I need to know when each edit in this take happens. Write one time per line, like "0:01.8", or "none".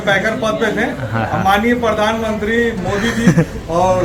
none